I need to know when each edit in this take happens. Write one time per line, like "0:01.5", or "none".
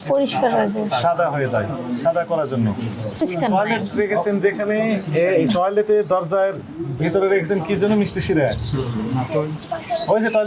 0:03.2